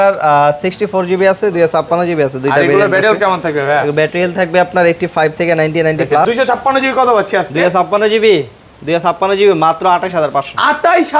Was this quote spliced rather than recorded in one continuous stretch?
yes; 1 cut; at 6.2 s

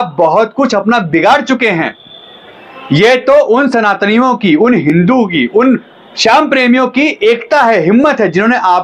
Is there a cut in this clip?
no; 0 cuts

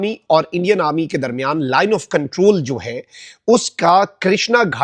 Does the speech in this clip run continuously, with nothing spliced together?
yes; 0 cuts

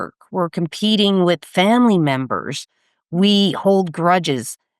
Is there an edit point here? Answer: no; 0 cuts

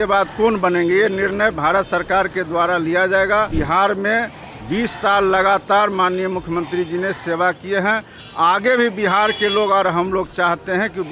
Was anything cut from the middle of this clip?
yes; 1 cut; at 3.5 s

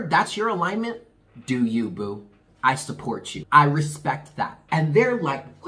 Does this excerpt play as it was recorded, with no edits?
no; 2 cuts; at 3.3 s, 4.6 s

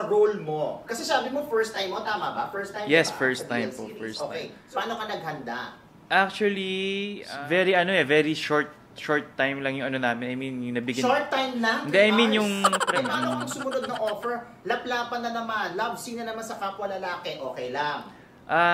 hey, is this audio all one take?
no; 3 cuts; at 4.6 s, 7.2 s, 12.9 s

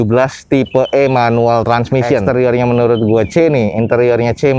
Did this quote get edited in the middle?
yes; 1 cut; at 2.2 s

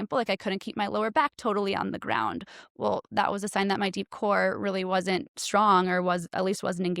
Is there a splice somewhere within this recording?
no; 0 cuts

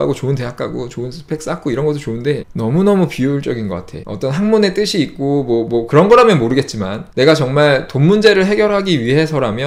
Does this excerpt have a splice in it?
no; 0 cuts

